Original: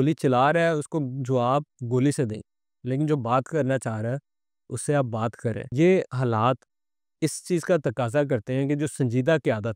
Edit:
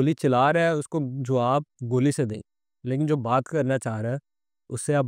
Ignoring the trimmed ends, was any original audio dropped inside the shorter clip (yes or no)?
no